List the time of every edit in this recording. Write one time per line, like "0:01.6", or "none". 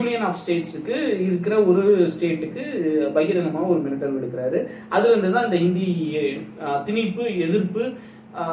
none